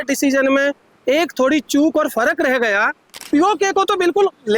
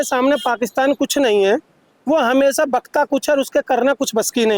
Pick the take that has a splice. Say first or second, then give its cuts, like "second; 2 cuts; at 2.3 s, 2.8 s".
first; 1 cut; at 3.1 s